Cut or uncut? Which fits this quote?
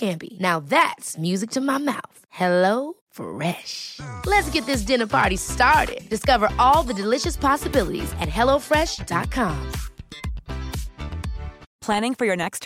uncut